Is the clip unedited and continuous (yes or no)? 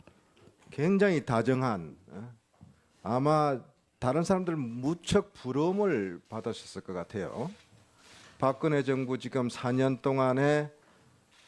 yes